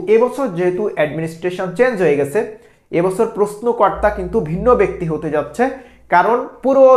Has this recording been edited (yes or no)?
no